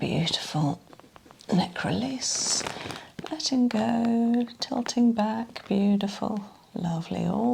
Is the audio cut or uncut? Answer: uncut